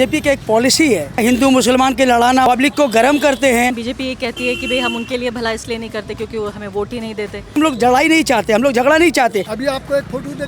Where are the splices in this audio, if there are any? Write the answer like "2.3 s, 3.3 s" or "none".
1.2 s, 2.4 s, 3.9 s, 7.5 s, 9.5 s